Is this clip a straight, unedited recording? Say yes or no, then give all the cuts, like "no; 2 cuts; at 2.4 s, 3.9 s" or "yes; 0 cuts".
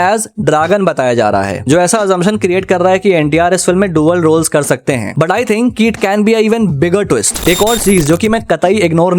no; 1 cut; at 7.3 s